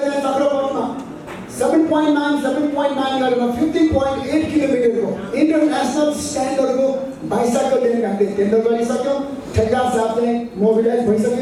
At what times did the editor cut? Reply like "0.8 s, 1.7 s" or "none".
none